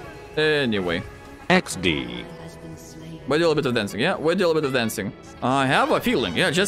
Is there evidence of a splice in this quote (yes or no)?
no